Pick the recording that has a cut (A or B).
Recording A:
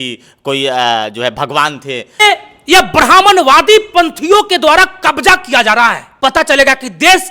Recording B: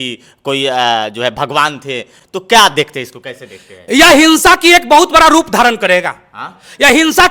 A